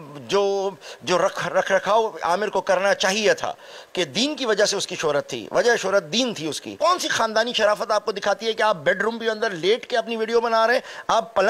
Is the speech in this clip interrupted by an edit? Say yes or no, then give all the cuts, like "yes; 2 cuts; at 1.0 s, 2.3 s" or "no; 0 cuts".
yes; 1 cut; at 6.7 s